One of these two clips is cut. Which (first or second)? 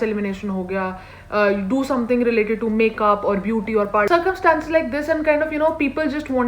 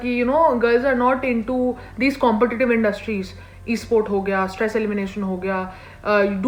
first